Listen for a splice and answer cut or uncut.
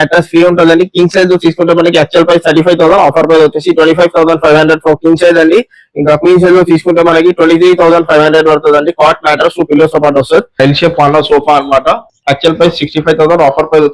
cut